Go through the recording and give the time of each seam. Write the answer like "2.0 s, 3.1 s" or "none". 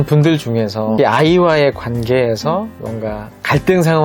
1.0 s

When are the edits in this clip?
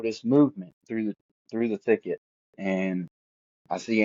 none

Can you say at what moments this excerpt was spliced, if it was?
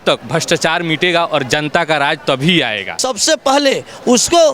3.0 s

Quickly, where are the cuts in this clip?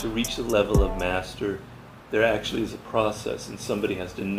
none

